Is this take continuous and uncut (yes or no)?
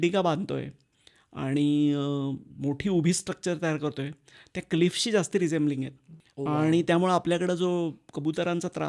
yes